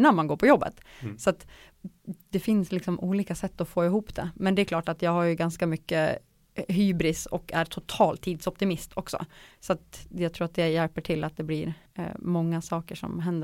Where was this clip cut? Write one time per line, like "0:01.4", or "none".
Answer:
0:11.9

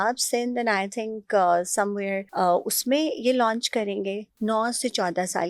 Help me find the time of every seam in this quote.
0:02.2

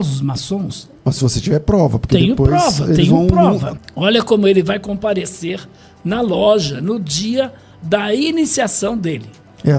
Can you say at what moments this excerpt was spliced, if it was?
0:03.7

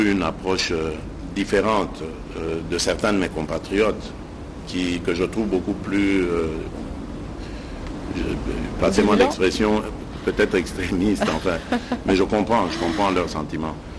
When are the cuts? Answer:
none

